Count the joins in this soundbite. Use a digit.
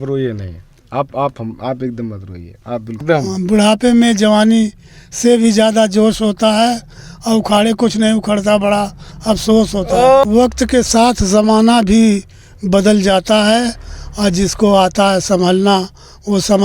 2